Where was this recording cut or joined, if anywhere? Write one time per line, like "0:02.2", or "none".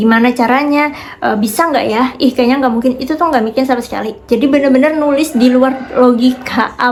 none